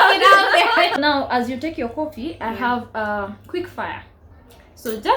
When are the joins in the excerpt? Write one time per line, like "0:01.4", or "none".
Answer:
0:01.0